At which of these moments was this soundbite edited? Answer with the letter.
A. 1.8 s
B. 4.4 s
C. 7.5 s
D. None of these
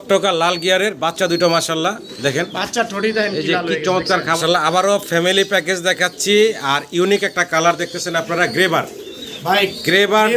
B